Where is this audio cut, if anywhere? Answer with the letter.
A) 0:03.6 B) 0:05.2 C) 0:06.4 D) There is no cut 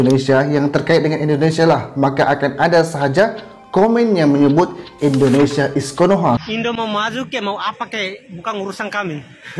C